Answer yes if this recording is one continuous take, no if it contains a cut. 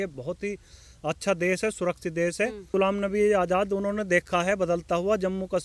no